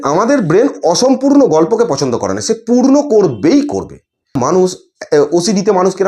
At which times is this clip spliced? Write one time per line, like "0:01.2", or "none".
0:04.4